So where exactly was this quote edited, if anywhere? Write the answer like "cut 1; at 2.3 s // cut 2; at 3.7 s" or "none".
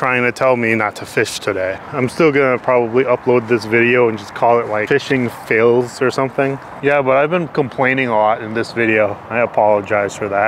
cut 1; at 1.8 s // cut 2; at 4.8 s // cut 3; at 6.7 s